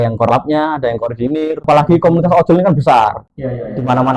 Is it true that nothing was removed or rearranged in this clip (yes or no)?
no